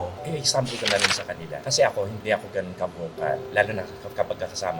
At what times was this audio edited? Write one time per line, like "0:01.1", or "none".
0:02.1
0:03.4